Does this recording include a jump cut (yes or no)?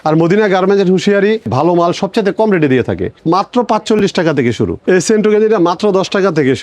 yes